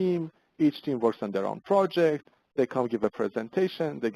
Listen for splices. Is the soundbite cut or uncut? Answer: cut